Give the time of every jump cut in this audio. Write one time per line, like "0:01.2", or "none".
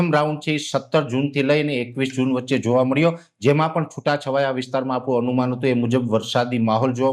none